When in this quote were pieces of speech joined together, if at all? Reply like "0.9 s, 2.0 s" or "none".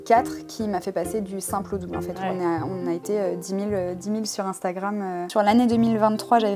5.3 s

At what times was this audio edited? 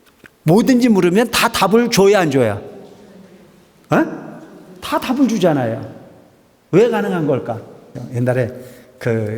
8.0 s

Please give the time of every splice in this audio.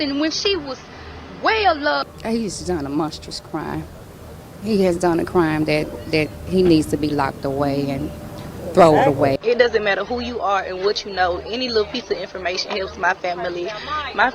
2.1 s, 9.4 s

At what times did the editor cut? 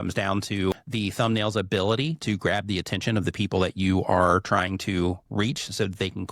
0.8 s, 5.2 s

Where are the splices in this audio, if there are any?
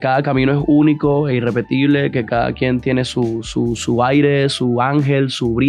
none

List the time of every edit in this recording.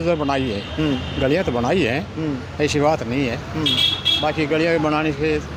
none

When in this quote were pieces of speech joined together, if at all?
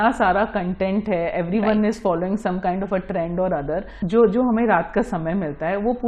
3.9 s

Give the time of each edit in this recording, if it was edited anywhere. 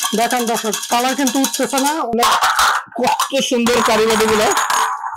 2.1 s

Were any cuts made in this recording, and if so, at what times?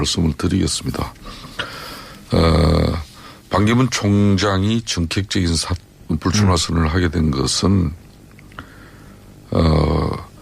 7.1 s

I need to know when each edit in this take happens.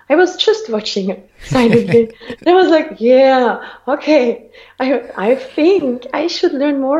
none

